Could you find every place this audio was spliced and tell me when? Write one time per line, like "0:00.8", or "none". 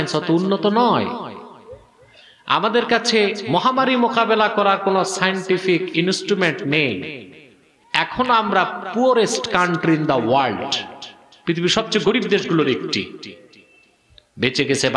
none